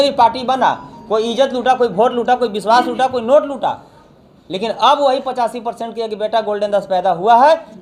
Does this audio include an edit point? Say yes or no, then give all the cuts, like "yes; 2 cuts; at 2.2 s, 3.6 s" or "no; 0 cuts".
no; 0 cuts